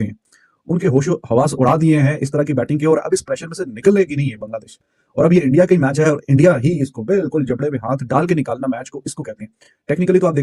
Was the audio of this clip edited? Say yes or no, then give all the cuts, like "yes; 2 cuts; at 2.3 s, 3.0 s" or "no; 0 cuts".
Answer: no; 0 cuts